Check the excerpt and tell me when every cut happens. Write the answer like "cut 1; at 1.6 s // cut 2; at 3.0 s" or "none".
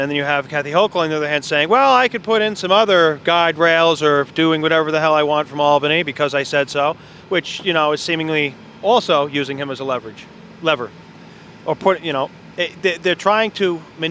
none